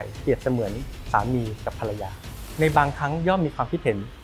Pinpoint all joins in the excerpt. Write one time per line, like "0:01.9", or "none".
none